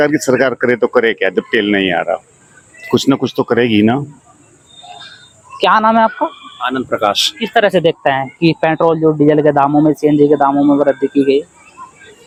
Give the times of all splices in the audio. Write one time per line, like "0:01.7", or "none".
none